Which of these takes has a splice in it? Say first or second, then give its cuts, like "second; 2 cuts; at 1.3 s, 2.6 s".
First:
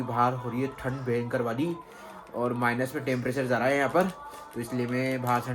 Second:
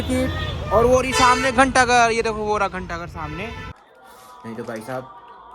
second; 1 cut; at 3.8 s